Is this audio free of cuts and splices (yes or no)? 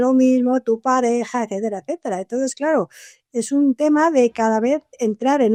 yes